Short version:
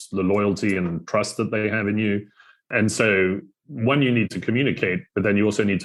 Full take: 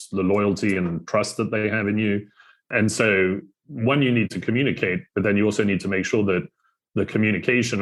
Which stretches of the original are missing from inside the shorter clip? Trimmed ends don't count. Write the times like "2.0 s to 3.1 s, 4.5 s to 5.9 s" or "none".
none